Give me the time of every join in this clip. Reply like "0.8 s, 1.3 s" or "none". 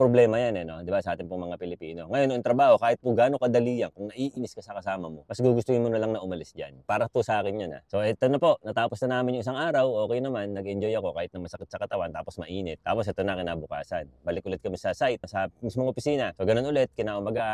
none